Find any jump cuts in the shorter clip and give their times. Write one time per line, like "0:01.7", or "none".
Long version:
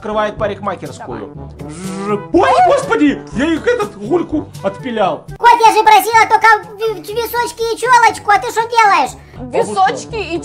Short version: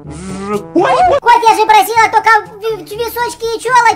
0:01.2